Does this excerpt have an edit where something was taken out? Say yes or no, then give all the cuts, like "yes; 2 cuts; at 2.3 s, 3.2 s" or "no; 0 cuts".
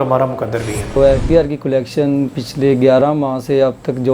yes; 1 cut; at 1.0 s